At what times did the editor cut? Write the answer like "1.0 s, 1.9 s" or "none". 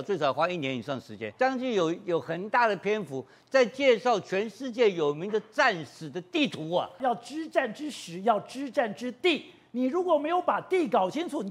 1.3 s, 7.0 s